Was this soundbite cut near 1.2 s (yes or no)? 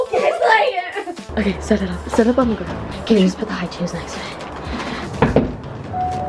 yes